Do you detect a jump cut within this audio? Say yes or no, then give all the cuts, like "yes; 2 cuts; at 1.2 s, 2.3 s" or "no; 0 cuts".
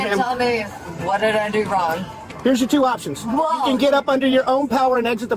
no; 0 cuts